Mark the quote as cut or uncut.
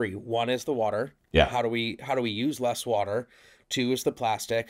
uncut